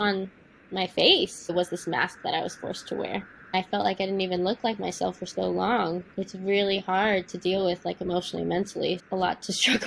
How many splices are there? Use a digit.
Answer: 4